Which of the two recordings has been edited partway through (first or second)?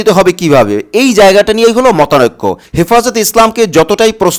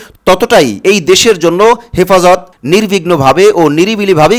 first